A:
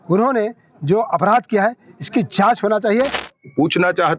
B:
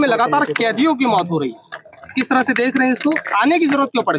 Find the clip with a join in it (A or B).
A